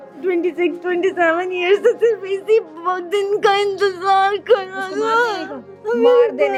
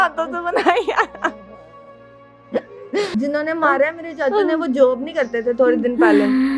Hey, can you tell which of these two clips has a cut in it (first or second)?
second